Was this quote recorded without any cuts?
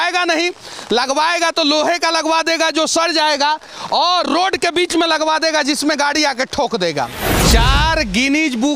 no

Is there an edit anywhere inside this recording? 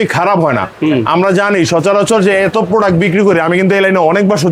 no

